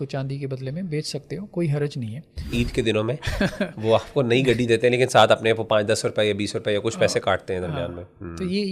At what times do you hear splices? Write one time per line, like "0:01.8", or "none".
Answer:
0:02.5